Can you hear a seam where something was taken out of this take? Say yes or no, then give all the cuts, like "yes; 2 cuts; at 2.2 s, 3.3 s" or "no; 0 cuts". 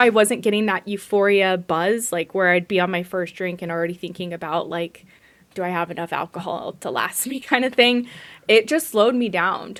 no; 0 cuts